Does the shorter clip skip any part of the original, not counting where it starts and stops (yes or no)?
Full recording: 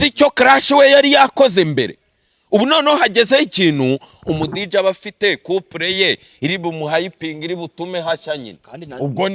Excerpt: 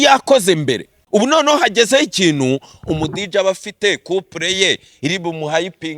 yes